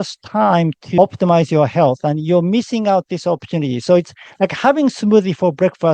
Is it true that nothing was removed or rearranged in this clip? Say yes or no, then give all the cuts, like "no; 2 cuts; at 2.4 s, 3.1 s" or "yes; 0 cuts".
no; 1 cut; at 1.0 s